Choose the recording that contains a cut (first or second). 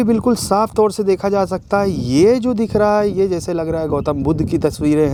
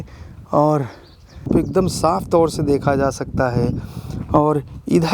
second